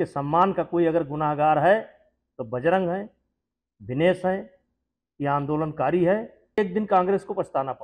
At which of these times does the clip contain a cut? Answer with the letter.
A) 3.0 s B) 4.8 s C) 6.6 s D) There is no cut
C